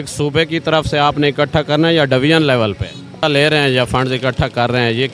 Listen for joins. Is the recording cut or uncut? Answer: cut